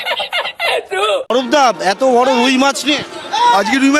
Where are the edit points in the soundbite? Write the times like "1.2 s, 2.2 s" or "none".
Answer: 1.2 s